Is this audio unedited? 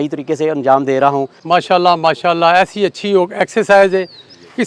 no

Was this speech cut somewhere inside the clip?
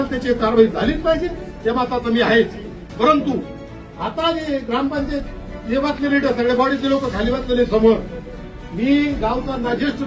no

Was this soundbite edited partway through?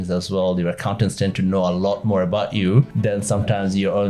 yes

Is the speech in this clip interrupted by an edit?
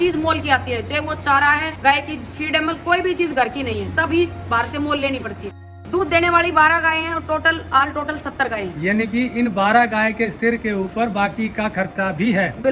yes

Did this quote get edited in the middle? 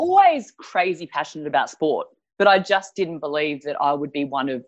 no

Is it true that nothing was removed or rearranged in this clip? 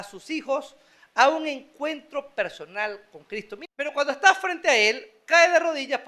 no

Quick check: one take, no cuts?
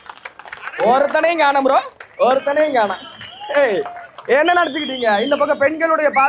yes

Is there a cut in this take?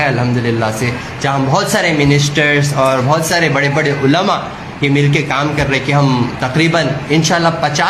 no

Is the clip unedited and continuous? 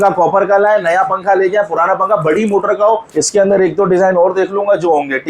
no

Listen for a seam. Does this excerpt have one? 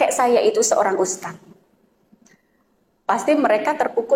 no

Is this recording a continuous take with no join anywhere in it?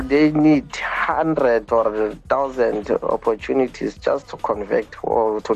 yes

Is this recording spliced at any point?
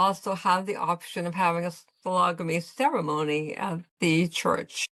no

